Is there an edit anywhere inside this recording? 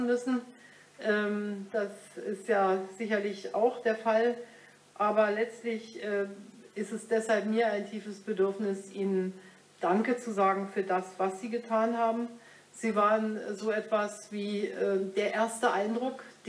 no; 0 cuts

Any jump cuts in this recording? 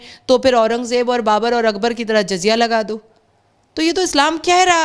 no; 0 cuts

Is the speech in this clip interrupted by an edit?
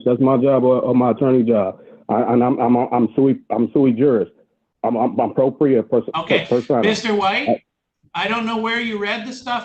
no; 0 cuts

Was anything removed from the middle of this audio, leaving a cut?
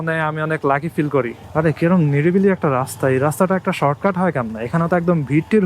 yes; 1 cut; at 1.4 s

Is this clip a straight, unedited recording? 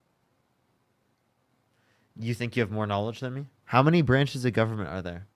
no; 1 cut; at 3.6 s

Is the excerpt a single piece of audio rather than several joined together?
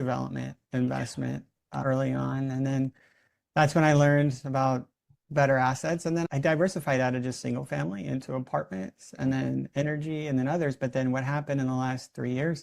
no; 1 cut; at 6.2 s

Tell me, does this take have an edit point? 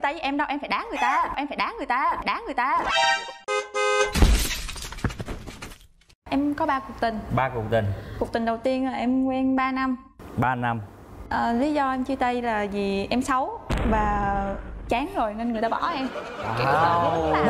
yes; 2 cuts; at 2.9 s, 6.1 s

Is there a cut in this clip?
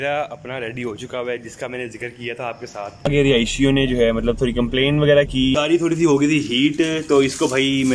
yes; 2 cuts; at 3.0 s, 5.5 s

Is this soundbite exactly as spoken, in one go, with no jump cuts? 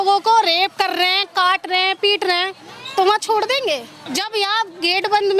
no; 1 cut; at 4.0 s

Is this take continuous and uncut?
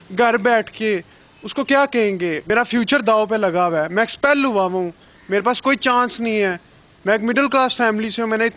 no; 1 cut; at 2.4 s

